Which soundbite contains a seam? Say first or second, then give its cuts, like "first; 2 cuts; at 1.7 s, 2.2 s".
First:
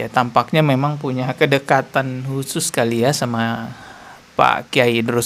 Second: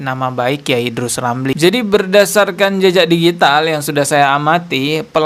second; 1 cut; at 1.5 s